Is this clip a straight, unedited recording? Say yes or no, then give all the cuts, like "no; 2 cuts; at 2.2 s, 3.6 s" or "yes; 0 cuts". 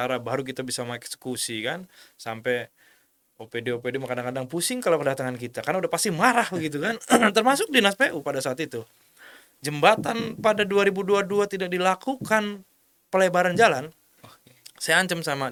yes; 0 cuts